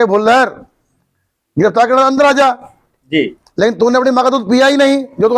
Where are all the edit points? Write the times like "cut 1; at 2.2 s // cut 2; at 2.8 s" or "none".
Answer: none